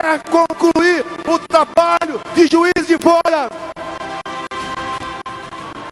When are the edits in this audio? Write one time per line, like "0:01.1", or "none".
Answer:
none